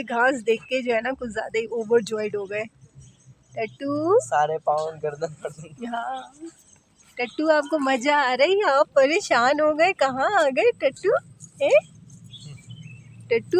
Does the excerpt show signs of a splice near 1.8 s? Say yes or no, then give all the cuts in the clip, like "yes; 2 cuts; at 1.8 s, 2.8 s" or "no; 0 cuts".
no; 0 cuts